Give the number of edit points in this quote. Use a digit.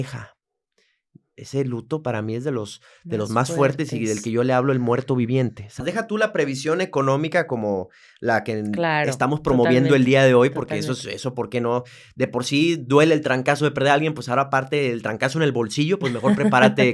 1